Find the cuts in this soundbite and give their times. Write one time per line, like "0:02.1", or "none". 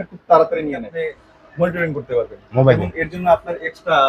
0:00.9